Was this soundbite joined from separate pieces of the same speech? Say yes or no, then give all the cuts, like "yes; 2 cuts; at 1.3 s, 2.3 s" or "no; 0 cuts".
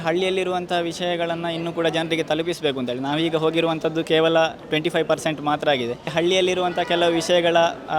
yes; 1 cut; at 6.1 s